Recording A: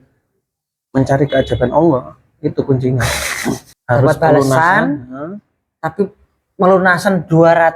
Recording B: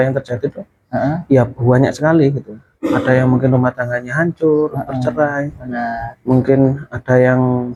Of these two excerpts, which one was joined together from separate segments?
A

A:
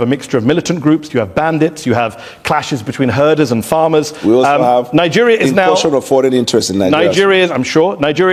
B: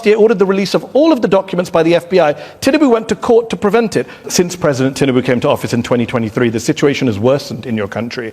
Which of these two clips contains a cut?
B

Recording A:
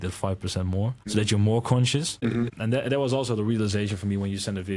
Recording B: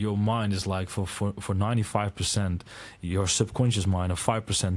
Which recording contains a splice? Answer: A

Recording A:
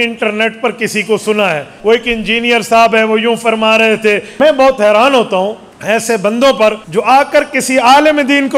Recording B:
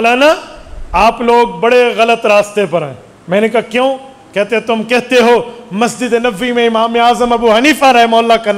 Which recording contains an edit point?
A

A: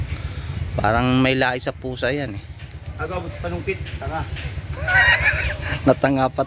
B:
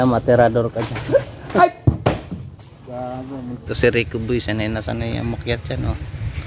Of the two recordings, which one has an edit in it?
B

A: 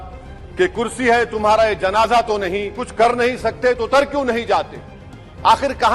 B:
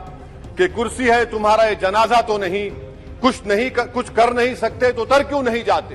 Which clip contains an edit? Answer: A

